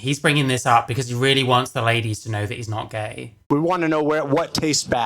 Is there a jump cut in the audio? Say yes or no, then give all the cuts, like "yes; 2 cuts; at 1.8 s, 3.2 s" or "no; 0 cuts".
yes; 1 cut; at 3.5 s